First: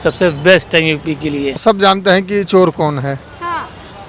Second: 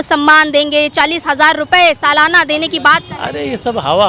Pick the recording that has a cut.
first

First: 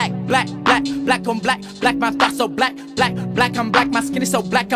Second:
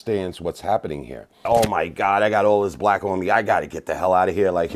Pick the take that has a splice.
second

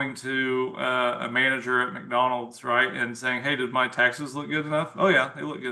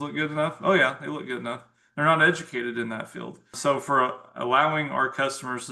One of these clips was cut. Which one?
second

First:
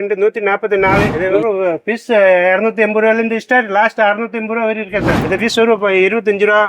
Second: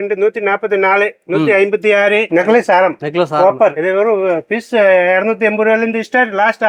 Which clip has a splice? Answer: first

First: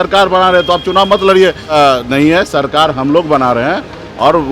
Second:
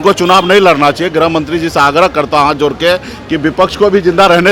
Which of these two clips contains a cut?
first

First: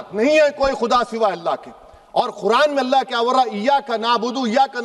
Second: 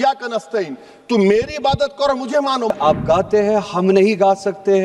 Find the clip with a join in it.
second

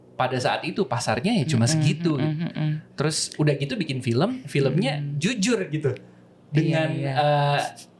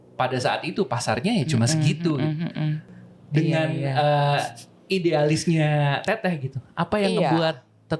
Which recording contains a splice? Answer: second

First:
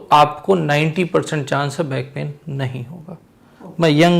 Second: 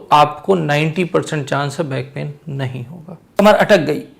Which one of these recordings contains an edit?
second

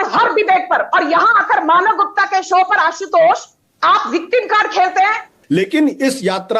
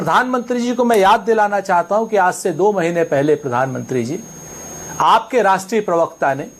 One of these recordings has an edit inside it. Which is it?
first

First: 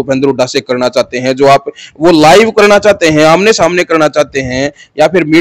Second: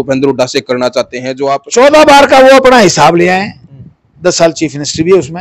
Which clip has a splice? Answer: second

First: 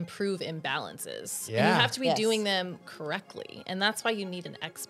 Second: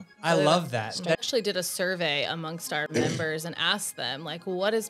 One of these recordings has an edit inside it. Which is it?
second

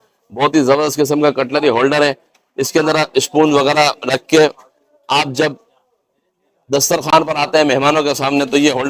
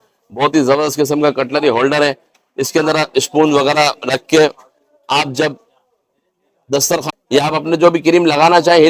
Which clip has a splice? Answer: second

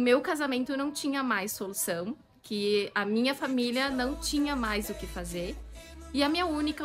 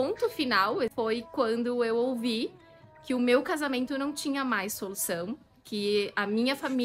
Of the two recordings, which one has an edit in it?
second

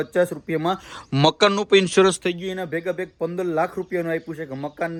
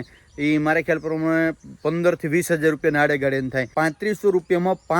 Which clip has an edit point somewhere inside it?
second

